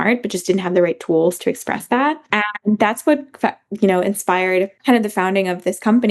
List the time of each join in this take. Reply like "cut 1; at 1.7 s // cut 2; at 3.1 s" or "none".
cut 1; at 2.3 s // cut 2; at 4.8 s